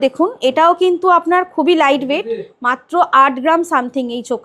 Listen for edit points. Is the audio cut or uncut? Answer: uncut